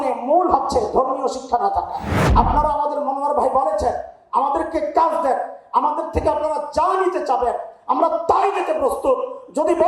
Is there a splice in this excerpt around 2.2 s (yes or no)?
yes